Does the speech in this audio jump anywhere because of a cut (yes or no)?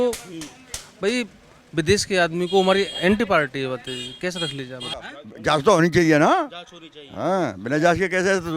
yes